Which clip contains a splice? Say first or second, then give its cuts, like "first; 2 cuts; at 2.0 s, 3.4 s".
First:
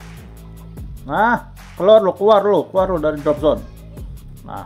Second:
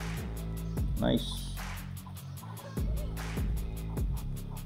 first; 1 cut; at 0.9 s